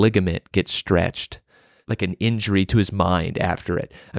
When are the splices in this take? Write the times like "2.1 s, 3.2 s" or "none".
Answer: 1.8 s